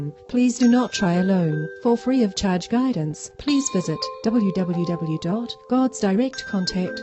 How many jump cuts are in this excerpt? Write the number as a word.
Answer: one